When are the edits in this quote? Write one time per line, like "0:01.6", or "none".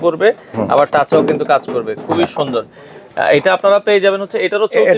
none